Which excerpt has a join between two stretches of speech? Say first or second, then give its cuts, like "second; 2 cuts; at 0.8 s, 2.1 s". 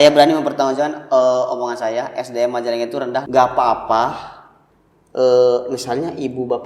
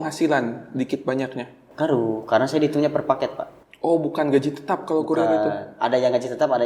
first; 1 cut; at 3.3 s